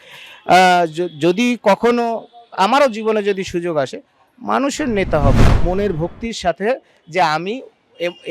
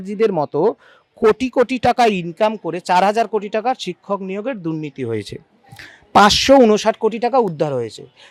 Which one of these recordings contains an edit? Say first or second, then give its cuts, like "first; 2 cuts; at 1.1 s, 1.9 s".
first; 1 cut; at 5.5 s